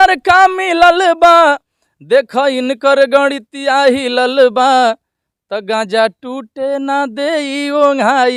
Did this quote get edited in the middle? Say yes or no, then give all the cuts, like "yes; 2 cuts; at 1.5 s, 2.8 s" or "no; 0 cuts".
no; 0 cuts